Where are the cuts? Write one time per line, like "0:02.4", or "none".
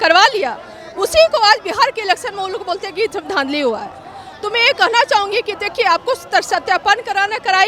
none